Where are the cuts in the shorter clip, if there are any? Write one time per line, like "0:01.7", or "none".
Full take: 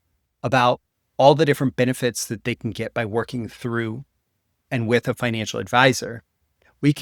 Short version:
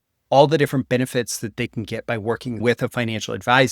0:02.6